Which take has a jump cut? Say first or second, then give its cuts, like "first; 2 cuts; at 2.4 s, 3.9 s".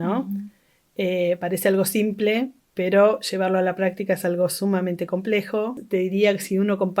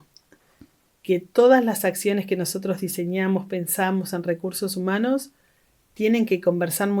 first; 1 cut; at 5.8 s